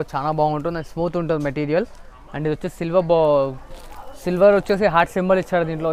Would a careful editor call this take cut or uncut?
uncut